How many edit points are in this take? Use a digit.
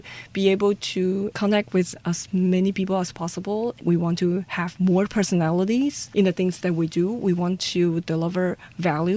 0